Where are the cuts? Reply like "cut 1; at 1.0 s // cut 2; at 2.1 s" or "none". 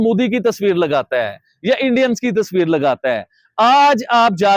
none